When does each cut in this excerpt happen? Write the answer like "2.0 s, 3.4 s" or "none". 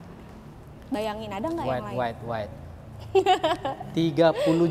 none